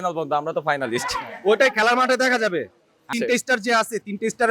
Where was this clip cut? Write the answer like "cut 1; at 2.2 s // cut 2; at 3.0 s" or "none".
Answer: cut 1; at 3.1 s